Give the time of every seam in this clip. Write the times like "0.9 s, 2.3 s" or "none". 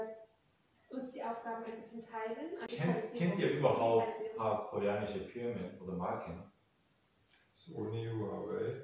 2.7 s